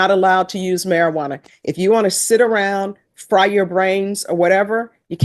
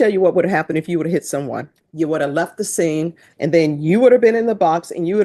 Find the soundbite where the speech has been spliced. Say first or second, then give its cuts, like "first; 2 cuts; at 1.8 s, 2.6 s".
second; 2 cuts; at 1.8 s, 3.2 s